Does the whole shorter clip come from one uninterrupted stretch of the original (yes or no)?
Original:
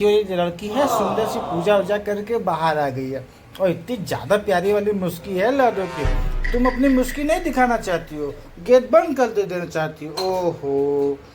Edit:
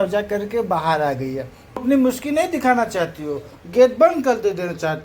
no